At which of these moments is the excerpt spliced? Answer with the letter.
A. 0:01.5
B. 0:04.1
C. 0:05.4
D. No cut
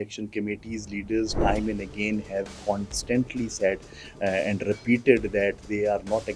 D